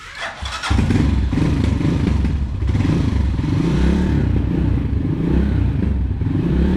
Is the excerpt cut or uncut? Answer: uncut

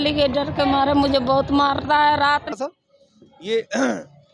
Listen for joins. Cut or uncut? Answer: cut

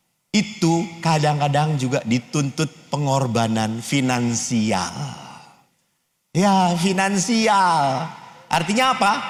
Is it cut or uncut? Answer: uncut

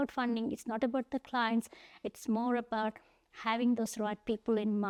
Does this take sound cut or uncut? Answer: uncut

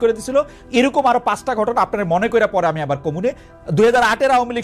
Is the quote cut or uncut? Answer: uncut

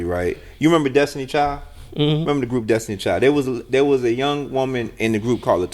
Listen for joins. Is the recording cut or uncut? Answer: uncut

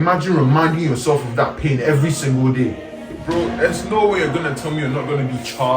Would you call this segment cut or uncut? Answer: cut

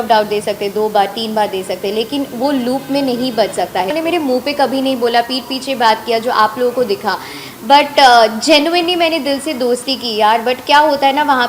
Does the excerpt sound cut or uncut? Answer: cut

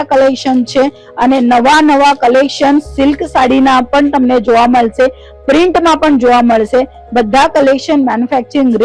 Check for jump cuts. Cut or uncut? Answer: uncut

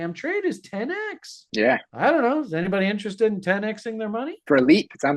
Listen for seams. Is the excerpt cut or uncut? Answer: uncut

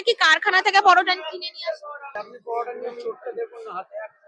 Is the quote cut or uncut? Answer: cut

